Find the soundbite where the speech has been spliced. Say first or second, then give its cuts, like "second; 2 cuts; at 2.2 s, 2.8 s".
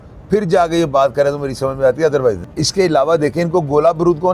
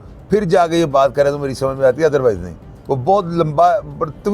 first; 1 cut; at 2.5 s